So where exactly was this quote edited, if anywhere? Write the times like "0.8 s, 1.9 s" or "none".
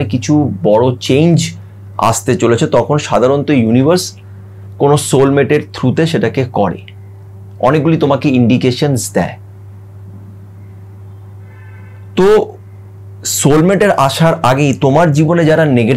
none